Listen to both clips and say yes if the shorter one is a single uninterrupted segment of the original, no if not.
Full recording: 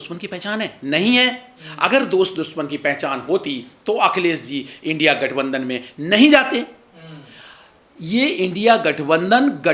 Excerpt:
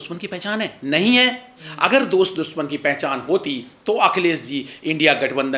yes